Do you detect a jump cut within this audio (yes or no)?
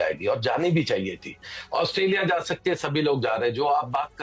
no